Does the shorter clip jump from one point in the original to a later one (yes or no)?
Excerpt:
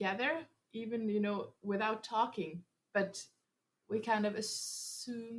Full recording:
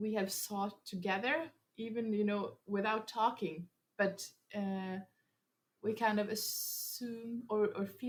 yes